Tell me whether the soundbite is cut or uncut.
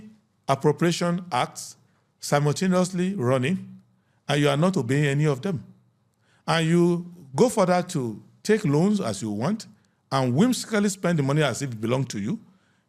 uncut